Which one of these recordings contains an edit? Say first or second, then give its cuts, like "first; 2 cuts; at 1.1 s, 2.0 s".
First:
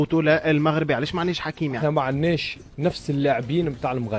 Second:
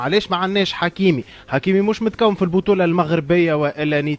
first; 1 cut; at 1.8 s